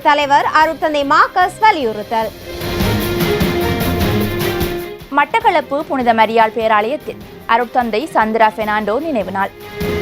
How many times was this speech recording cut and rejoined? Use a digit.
2